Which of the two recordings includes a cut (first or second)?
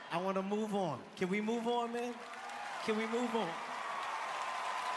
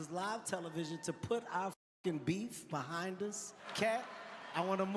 second